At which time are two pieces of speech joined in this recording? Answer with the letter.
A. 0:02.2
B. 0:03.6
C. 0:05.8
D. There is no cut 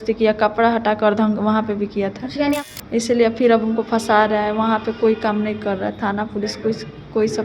A